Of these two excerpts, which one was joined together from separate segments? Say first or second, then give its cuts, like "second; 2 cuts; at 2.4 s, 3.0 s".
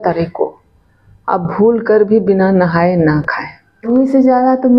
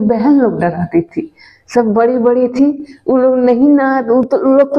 first; 1 cut; at 3.9 s